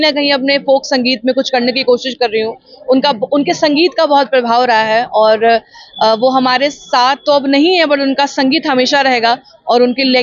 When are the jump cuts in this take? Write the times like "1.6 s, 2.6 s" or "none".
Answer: none

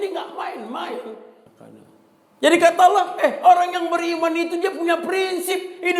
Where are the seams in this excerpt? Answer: 1.3 s

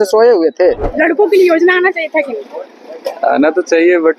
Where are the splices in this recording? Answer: 0.9 s

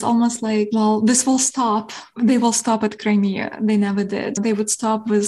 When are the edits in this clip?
2.1 s

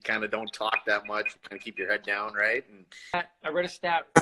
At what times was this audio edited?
3.2 s

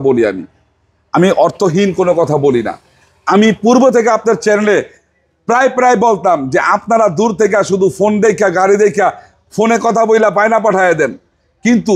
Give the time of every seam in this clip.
none

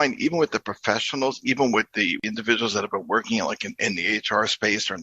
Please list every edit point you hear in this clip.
2.2 s

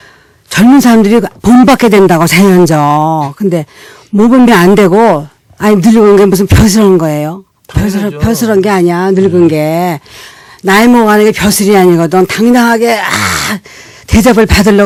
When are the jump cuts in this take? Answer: none

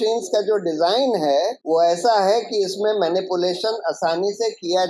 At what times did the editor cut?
1.6 s

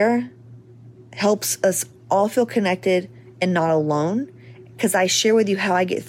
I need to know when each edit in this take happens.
none

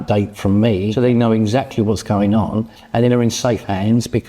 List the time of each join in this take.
0.9 s

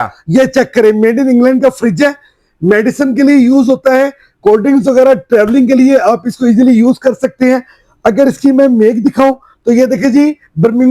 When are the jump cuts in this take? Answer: none

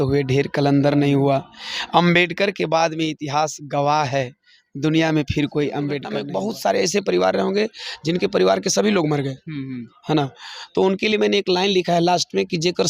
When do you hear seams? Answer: 6.1 s

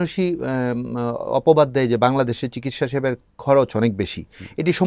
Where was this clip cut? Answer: none

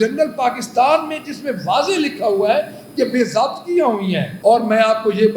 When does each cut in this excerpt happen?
4.3 s

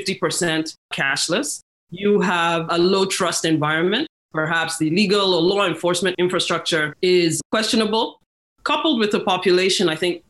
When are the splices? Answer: 4.1 s, 6.4 s, 8.3 s

